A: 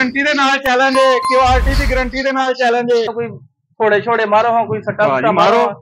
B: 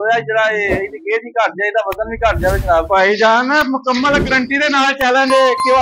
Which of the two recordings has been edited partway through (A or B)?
A